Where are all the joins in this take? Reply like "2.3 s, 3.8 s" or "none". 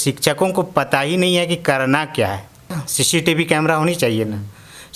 2.9 s